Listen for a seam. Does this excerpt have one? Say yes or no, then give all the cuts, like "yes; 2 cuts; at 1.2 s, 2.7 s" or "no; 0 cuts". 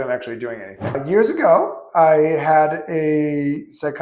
yes; 1 cut; at 1.0 s